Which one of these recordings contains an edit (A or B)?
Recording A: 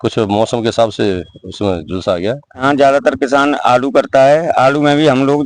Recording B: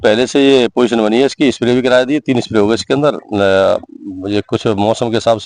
A